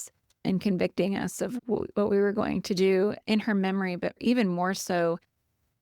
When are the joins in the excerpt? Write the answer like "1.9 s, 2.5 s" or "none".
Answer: 4.2 s